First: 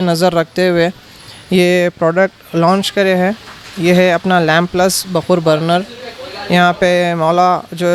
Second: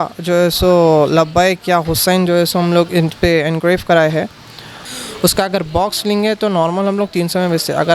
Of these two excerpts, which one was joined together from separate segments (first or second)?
second